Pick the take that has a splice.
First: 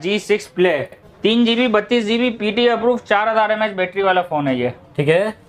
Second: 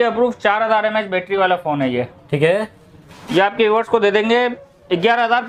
first; 1 cut; at 1.0 s

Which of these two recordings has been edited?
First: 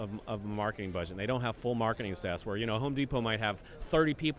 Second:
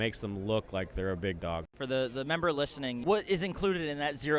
second; 2 cuts; at 1.7 s, 3.0 s

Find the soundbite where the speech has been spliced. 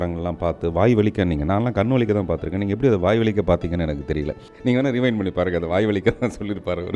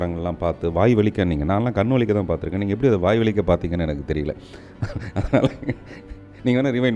first; 1 cut; at 4.4 s

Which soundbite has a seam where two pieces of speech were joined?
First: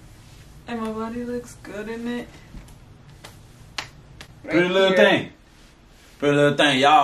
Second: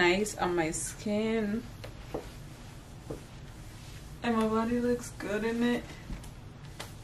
first; 1 cut; at 4.4 s

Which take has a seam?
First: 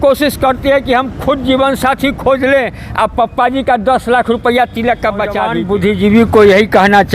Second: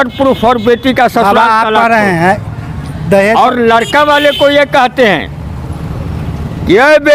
first; 1 cut; at 5.6 s

